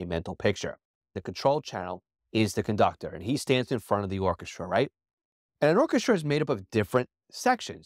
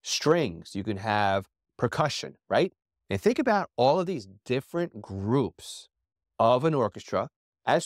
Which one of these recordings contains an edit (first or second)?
first